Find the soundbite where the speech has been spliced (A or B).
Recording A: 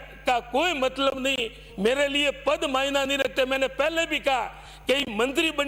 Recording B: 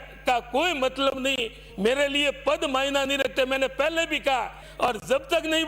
B